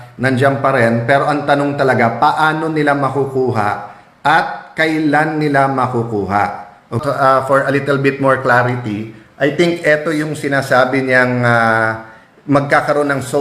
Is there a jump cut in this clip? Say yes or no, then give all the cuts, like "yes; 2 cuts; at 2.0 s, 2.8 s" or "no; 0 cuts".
yes; 1 cut; at 7.0 s